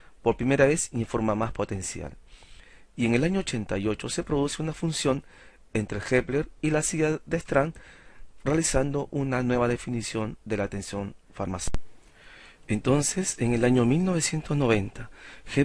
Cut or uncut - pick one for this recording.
cut